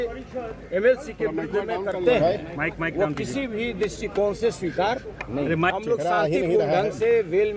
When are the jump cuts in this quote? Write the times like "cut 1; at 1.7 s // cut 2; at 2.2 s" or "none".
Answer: none

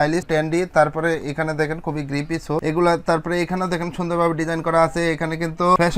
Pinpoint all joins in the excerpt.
none

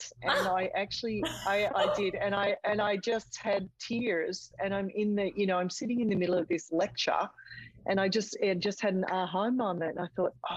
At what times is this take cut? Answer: none

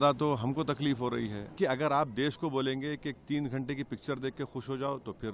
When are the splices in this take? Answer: cut 1; at 1.6 s

